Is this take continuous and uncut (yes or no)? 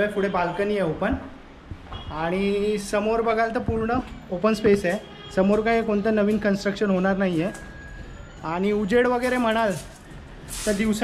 yes